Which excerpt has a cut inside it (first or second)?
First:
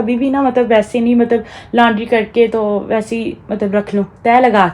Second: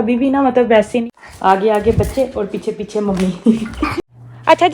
second